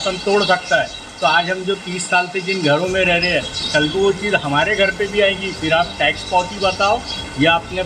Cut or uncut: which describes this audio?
uncut